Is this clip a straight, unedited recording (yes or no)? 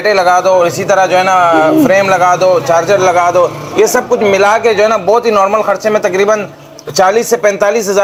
yes